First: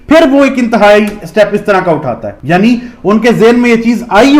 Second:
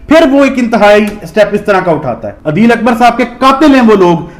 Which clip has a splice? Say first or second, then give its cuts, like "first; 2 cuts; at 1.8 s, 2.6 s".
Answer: second; 1 cut; at 2.4 s